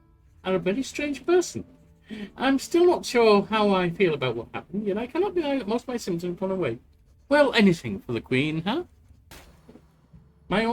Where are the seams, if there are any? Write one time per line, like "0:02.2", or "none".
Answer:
0:09.3